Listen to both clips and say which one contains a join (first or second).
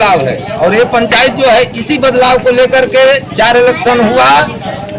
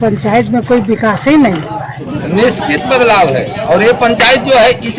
second